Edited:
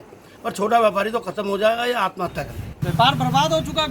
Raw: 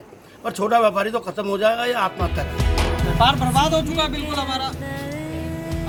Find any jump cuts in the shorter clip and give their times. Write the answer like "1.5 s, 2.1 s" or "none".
2.6 s

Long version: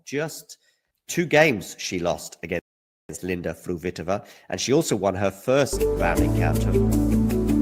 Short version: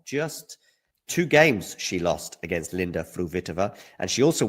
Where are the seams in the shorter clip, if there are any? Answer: 2.3 s

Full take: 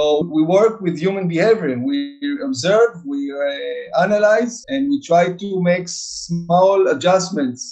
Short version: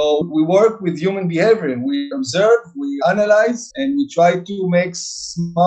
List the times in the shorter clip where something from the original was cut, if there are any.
2.1 s, 2.9 s

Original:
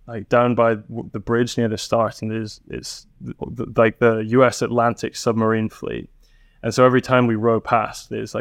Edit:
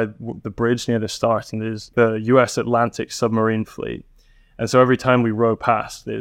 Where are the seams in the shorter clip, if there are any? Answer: 1.9 s

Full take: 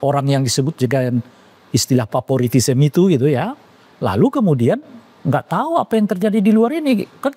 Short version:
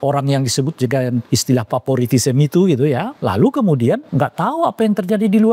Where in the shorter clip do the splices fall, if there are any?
1.2 s, 3.1 s, 4.1 s

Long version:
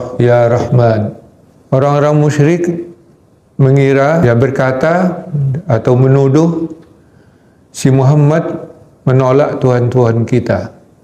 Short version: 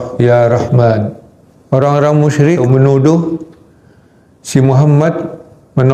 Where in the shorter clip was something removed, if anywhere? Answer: 2.6 s

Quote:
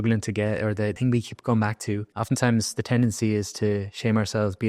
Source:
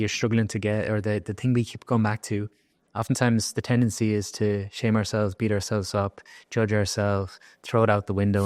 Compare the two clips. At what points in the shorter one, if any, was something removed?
1.0 s, 2.1 s

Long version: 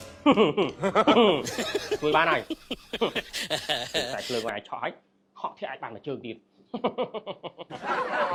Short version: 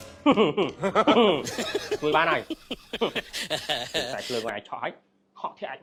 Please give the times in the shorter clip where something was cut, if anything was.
none

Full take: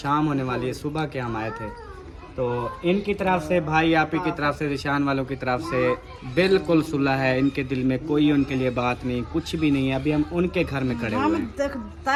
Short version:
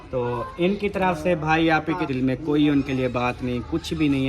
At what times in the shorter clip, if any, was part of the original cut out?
2.1 s

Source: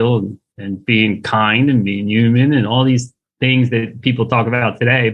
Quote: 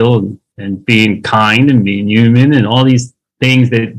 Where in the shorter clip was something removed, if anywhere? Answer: none

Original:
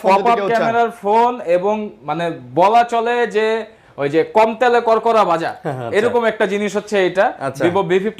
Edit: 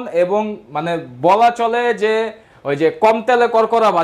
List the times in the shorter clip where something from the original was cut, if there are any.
none

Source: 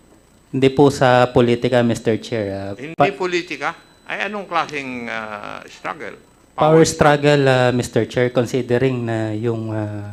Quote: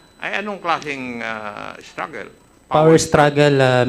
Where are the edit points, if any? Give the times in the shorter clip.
none

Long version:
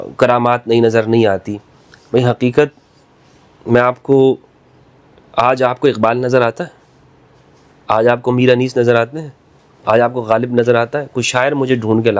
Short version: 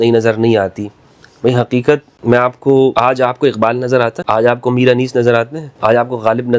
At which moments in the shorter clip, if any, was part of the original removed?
2.1 s, 2.9 s, 4.2 s, 5.6 s

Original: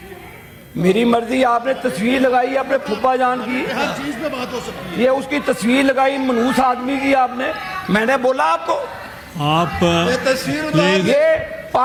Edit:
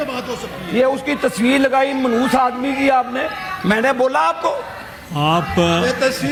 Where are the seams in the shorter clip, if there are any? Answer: none

